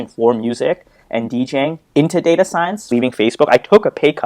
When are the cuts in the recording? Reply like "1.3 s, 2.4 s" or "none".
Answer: 2.9 s